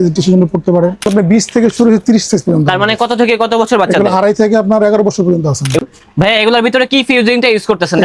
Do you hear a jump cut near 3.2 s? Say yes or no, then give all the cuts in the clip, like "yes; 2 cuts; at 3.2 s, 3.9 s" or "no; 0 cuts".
no; 2 cuts; at 1.1 s, 5.8 s